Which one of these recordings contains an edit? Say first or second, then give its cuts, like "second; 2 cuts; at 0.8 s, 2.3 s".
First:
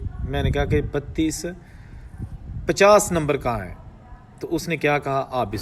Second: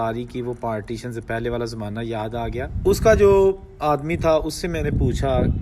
second; 1 cut; at 2.7 s